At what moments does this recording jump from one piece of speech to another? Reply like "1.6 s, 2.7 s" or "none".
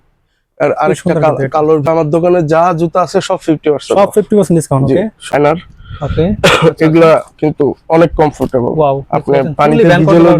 1.8 s, 5.3 s